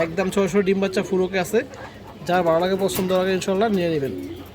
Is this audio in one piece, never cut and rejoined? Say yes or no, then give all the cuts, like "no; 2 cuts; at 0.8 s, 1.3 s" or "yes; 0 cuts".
yes; 0 cuts